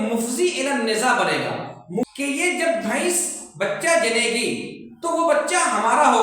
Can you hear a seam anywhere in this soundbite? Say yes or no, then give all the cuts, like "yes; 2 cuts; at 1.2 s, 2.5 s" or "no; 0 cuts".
yes; 1 cut; at 2.0 s